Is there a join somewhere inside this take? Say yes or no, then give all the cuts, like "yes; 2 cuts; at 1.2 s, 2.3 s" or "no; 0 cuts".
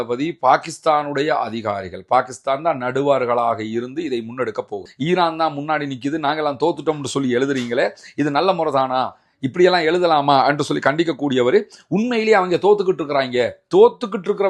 yes; 1 cut; at 4.8 s